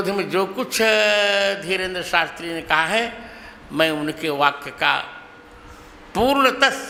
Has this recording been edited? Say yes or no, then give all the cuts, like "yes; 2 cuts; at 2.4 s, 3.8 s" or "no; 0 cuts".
no; 0 cuts